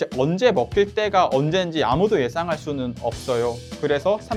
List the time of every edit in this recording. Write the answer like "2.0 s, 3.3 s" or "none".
none

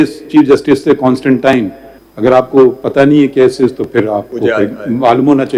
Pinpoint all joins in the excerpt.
1.8 s

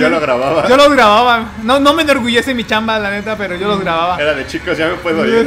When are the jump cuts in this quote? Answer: none

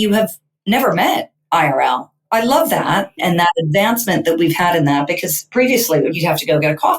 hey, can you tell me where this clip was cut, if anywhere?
2.1 s, 3.2 s, 6.2 s

